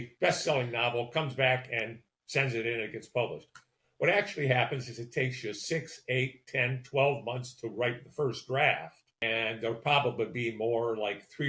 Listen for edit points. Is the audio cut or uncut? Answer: cut